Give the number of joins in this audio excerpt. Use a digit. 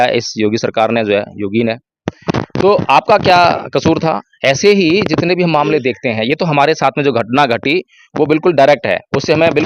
0